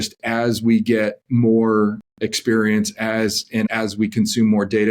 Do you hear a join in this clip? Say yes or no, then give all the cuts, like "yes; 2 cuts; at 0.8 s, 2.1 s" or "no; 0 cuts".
yes; 1 cut; at 3.7 s